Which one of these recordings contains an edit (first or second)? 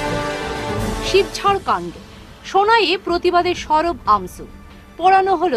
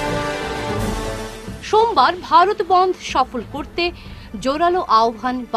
first